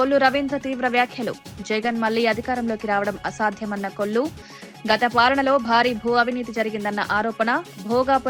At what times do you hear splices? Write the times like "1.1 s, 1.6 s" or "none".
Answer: none